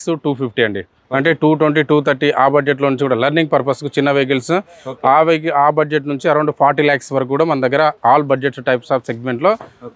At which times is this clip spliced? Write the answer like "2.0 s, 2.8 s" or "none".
none

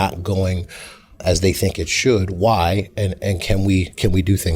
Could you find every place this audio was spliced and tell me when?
1.2 s

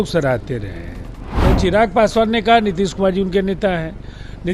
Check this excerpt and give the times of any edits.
1.3 s

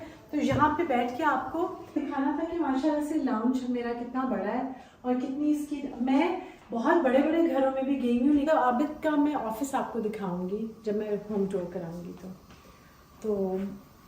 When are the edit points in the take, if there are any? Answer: 2.0 s, 8.5 s

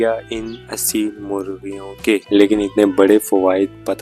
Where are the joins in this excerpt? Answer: 2.2 s

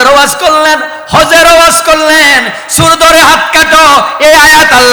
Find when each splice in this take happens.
none

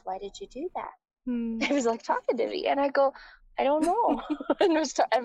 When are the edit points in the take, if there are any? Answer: none

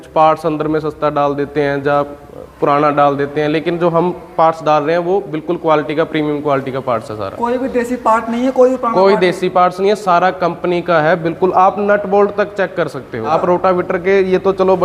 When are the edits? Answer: none

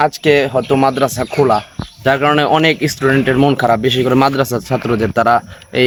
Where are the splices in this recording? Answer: none

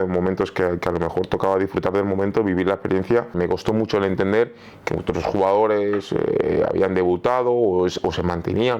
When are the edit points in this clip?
3.3 s

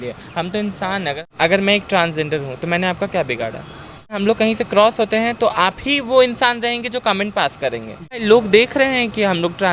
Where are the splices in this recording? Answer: 1.2 s, 4.2 s, 8.2 s

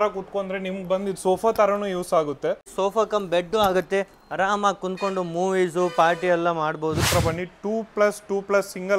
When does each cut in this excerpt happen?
2.7 s, 7.0 s

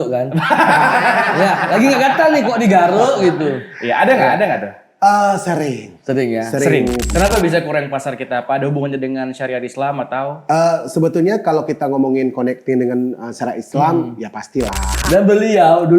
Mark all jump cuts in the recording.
7.1 s, 14.9 s

